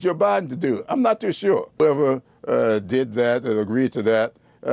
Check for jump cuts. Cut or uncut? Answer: cut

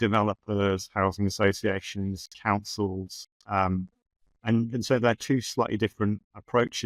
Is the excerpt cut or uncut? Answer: uncut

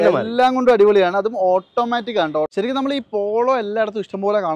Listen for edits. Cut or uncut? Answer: cut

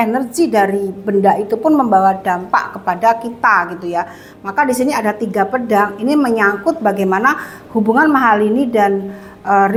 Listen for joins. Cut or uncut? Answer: uncut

